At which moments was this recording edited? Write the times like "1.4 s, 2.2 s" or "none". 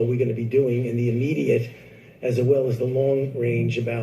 1.2 s